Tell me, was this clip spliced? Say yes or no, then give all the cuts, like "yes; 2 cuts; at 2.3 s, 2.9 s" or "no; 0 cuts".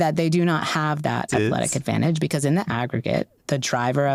no; 0 cuts